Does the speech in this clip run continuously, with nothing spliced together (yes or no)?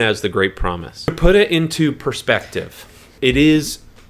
no